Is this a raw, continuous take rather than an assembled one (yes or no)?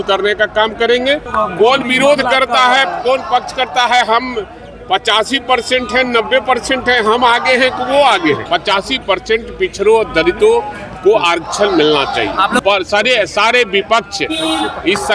no